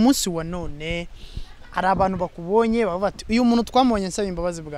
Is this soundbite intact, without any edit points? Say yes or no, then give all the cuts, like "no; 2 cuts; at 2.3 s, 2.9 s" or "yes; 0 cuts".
yes; 0 cuts